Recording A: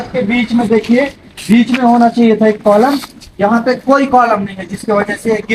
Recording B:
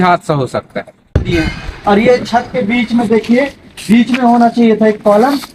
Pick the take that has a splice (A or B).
B